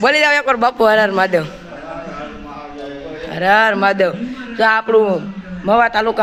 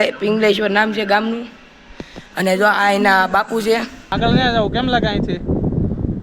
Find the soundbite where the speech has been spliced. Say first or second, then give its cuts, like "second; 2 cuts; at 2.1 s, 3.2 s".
second; 1 cut; at 4.1 s